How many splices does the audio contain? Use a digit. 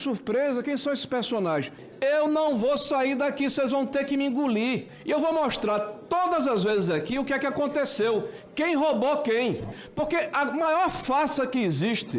3